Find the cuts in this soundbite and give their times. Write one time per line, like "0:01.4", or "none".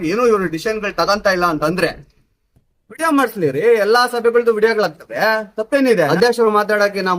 0:06.1